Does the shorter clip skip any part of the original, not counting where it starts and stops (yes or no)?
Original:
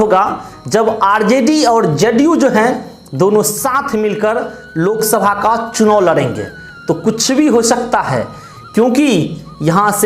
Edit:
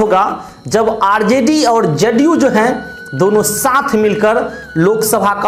no